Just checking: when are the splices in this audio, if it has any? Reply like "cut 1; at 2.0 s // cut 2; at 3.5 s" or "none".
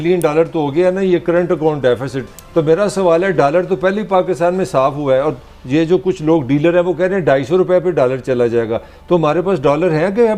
none